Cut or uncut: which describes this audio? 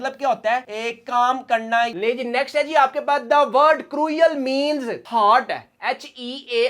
cut